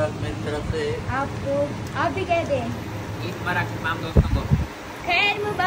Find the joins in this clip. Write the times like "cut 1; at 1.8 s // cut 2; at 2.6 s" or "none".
none